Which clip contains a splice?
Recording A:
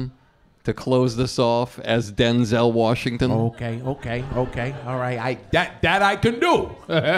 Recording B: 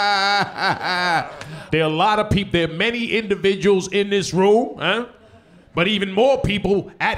B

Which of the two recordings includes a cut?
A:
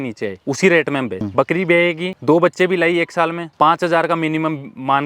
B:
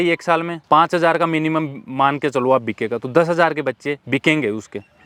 A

